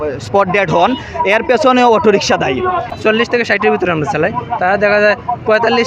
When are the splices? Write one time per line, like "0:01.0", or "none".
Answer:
0:02.8